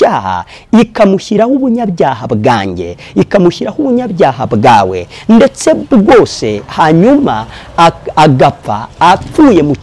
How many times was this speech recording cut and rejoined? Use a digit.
0